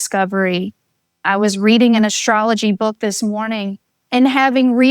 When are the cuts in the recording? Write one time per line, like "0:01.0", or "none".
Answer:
0:01.2